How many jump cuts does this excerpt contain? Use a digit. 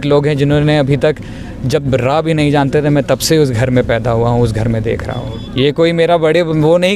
0